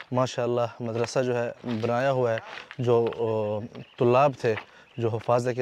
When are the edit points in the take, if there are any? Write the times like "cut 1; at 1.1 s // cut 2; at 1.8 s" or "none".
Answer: none